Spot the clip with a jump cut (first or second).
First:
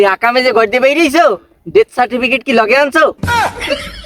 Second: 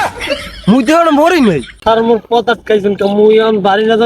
second